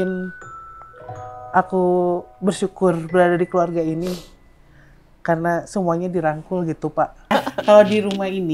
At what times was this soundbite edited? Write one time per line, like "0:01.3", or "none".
0:07.3